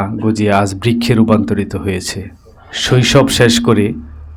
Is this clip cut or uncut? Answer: uncut